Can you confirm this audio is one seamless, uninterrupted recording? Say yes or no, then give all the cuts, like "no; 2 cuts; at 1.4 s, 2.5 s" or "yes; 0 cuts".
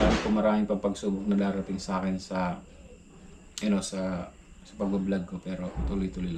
yes; 0 cuts